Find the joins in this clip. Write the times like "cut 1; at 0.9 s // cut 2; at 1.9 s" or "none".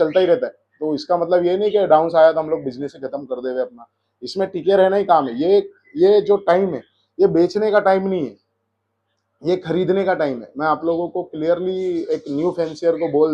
none